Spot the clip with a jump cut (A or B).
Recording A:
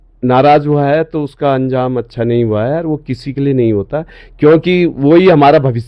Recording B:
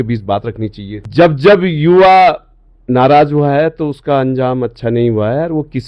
B